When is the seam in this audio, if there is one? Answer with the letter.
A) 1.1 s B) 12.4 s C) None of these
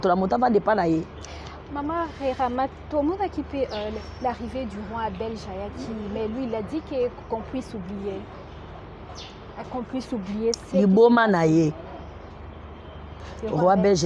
C